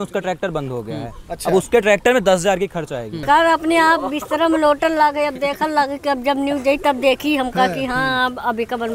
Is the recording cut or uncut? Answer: cut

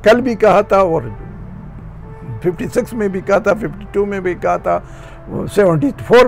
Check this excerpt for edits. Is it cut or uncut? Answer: uncut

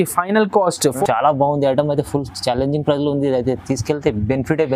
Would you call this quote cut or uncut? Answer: cut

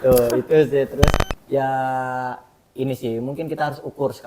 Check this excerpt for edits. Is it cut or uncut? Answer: cut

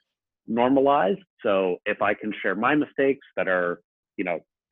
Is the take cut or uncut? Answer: uncut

